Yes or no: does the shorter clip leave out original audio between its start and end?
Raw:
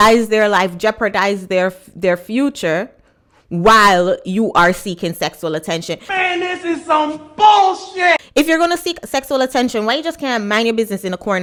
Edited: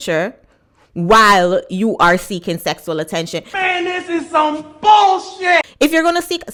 no